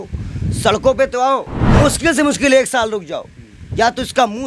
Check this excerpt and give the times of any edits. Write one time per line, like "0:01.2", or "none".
0:01.6